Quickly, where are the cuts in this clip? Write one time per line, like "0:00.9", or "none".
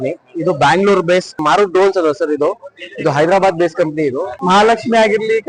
0:01.4
0:04.3